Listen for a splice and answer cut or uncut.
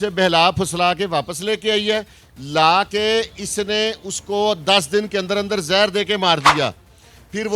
uncut